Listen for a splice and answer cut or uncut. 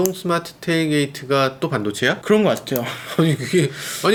uncut